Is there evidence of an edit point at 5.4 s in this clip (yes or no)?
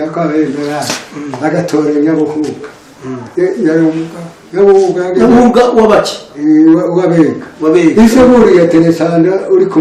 no